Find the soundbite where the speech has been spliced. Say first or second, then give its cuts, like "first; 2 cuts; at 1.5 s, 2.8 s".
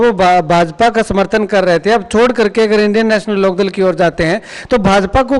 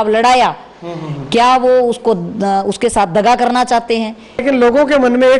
second; 1 cut; at 4.3 s